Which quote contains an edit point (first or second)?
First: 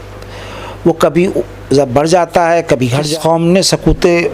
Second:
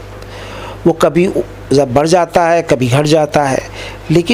first